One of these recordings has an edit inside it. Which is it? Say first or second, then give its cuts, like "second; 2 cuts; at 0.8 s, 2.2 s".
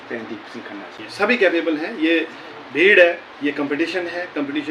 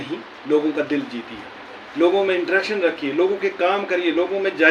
first; 1 cut; at 1.0 s